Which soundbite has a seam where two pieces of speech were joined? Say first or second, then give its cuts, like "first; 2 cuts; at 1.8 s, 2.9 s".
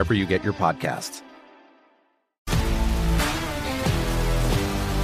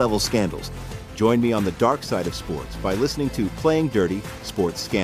first; 1 cut; at 2.3 s